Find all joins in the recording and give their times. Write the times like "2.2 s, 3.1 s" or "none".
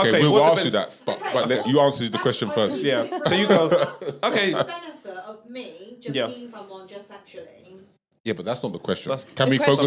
none